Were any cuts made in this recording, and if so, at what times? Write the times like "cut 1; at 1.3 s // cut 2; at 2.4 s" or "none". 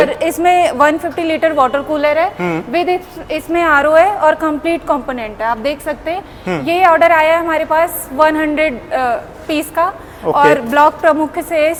none